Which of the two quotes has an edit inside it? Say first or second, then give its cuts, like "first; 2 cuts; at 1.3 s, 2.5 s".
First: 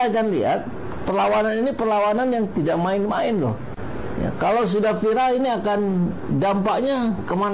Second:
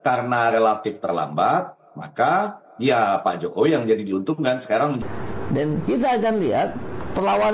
second; 1 cut; at 5.0 s